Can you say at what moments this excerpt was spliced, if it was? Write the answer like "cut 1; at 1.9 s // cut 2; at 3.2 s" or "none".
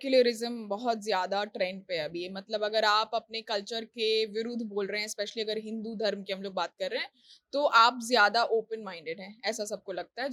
none